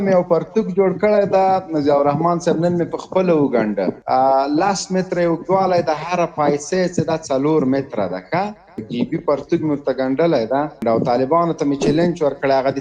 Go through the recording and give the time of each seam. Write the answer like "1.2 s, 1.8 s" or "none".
4.0 s, 8.8 s, 10.8 s